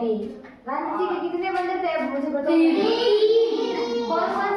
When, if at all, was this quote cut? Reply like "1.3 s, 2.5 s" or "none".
none